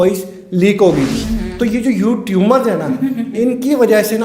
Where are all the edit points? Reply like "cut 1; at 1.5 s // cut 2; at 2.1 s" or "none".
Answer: cut 1; at 1.3 s